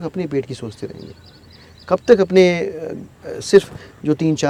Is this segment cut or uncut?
uncut